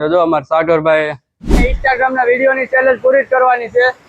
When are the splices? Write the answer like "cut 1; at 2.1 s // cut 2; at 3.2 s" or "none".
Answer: cut 1; at 1.6 s